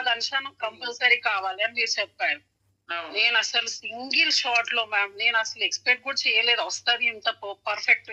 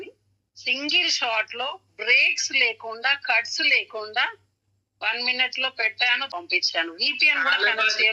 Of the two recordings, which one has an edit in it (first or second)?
second